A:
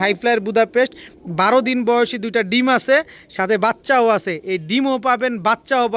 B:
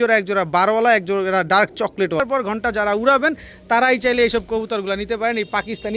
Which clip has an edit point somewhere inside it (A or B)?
B